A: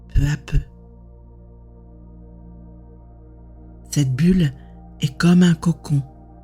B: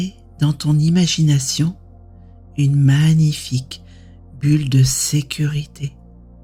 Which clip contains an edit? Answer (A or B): A